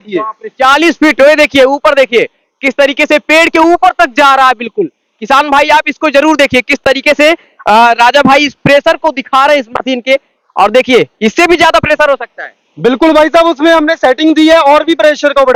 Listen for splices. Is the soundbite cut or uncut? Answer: uncut